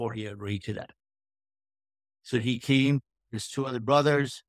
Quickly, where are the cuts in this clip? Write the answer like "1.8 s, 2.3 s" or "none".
none